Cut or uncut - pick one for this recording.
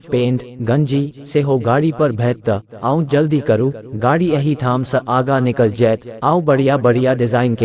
uncut